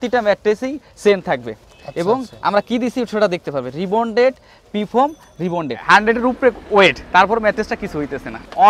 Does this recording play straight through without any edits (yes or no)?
no